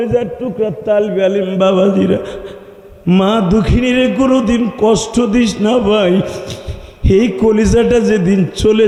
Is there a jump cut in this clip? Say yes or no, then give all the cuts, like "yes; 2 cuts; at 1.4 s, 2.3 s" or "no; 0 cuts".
no; 0 cuts